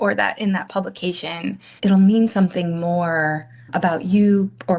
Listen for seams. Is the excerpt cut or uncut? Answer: cut